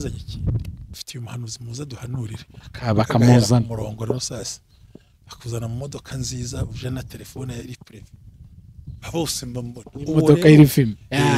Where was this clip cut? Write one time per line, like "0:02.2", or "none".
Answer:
0:01.0